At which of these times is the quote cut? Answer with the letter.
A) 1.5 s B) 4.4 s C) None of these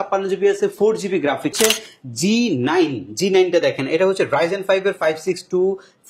A